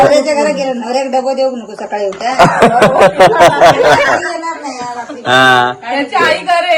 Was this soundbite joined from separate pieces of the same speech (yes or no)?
no